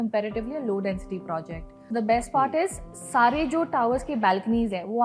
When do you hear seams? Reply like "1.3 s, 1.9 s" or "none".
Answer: 1.9 s